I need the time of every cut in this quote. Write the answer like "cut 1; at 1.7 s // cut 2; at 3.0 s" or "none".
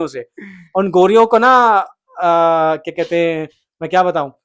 none